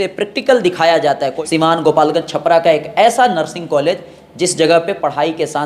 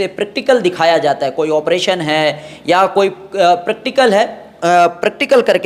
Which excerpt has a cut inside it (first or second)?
first